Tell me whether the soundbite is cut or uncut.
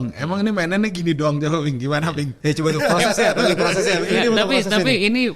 uncut